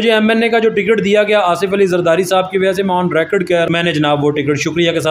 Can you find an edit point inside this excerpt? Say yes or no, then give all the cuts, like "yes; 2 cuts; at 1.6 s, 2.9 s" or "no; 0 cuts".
yes; 1 cut; at 3.7 s